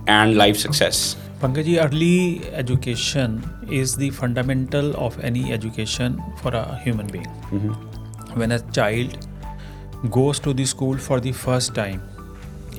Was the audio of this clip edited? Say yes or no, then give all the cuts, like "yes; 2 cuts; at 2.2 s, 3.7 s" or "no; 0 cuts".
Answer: no; 0 cuts